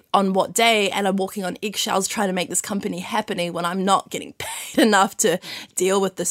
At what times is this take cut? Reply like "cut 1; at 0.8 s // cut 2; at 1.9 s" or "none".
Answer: none